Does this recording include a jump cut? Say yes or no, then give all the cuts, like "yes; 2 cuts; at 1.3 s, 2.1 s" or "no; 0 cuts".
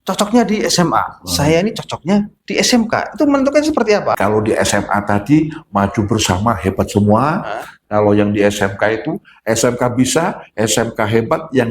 yes; 1 cut; at 4.1 s